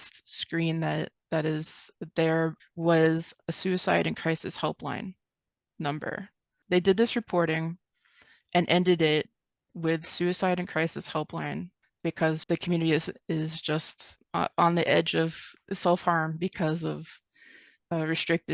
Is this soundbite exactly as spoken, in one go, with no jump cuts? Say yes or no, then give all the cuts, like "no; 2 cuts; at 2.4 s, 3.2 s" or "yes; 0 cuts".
no; 5 cuts; at 2.6 s, 6.5 s, 11.8 s, 12.4 s, 15.5 s